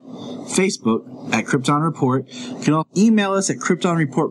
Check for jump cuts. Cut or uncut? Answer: cut